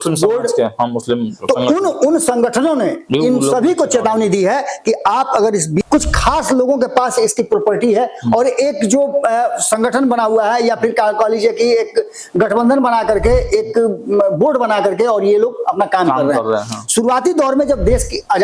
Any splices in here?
yes; 1 cut; at 5.8 s

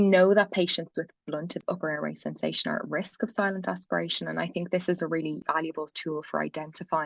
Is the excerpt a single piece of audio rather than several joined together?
no; 2 cuts; at 1.6 s, 5.4 s

